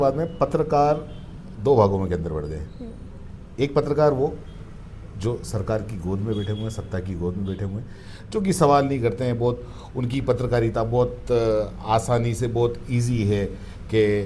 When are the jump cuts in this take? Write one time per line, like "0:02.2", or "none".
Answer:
none